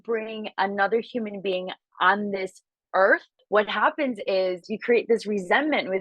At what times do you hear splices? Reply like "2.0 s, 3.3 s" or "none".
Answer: 3.3 s, 4.7 s